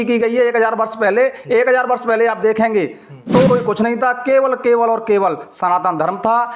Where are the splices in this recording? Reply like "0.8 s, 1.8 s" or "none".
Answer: 3.5 s